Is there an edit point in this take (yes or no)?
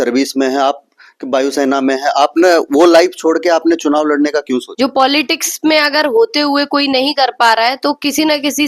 yes